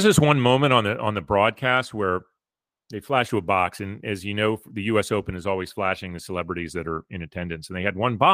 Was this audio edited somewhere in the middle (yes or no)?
no